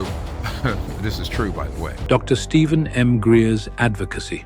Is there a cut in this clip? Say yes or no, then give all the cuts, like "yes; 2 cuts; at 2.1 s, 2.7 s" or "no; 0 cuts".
yes; 1 cut; at 2.0 s